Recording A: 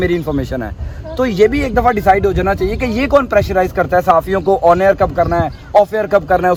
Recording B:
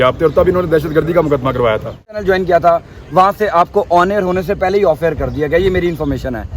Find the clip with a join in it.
B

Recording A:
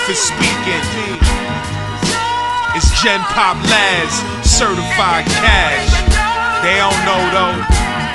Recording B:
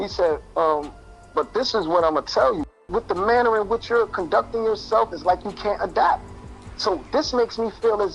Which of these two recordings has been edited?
B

